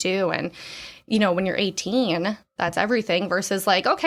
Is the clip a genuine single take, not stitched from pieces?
yes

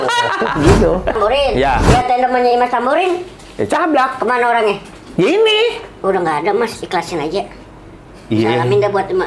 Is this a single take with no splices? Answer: no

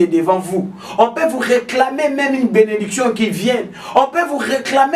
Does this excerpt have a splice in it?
no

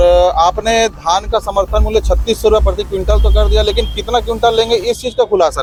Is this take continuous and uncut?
yes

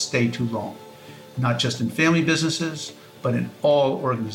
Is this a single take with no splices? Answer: yes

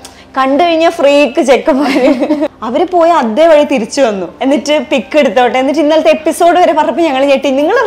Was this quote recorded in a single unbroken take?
no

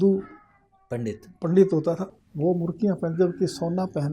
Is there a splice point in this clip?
yes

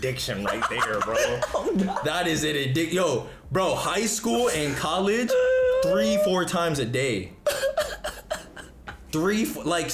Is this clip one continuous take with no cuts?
yes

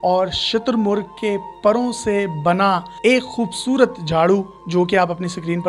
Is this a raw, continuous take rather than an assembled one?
yes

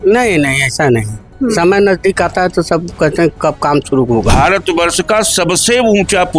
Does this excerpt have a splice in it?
yes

